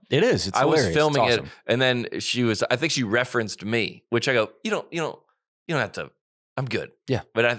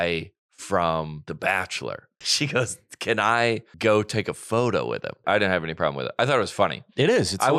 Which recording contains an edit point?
second; 4 cuts; at 1.2 s, 2.2 s, 3.7 s, 5.2 s

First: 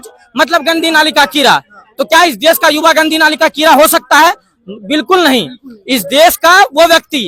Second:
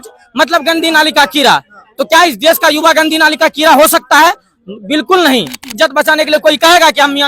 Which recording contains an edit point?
second; 1 cut; at 5.7 s

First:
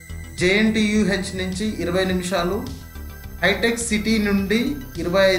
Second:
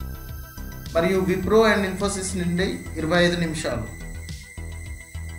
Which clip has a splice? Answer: second; 1 cut; at 3.9 s

